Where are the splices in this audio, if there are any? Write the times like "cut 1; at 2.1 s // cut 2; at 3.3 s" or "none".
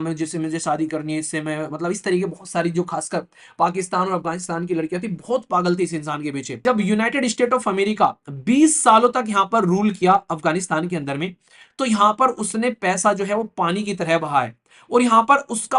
cut 1; at 6.5 s